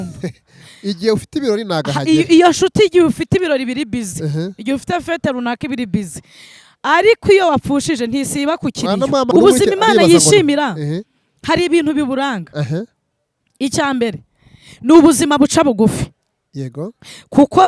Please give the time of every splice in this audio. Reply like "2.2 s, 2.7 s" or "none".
9.3 s

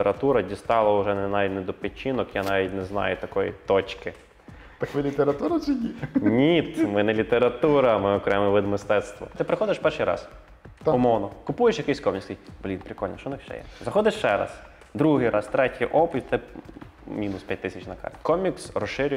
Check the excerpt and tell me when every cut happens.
9.3 s, 18.1 s

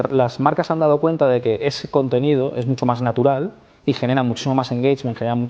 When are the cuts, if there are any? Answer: none

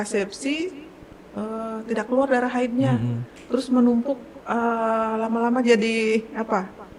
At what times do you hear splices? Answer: none

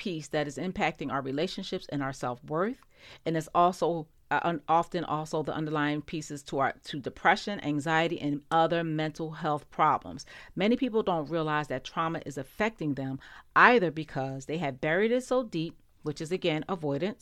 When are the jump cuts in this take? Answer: none

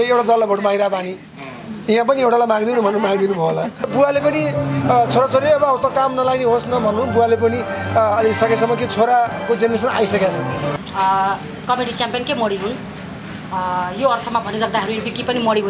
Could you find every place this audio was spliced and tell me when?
3.9 s, 10.7 s

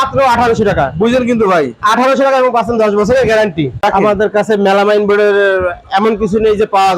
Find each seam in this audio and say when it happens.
3.8 s

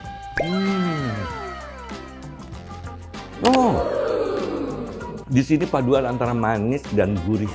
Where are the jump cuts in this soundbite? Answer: none

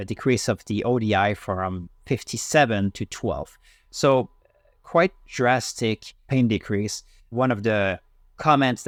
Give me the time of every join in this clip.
none

